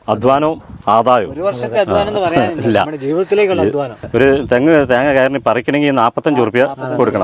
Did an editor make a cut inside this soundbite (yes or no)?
yes